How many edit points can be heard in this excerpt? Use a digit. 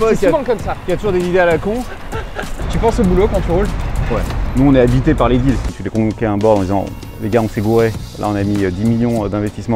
3